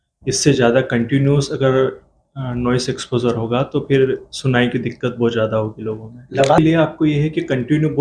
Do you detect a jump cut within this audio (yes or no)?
yes